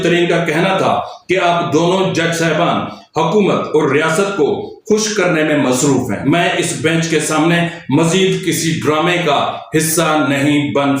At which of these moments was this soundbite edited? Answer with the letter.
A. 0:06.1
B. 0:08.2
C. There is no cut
A